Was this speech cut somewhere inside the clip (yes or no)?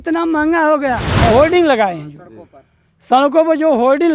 yes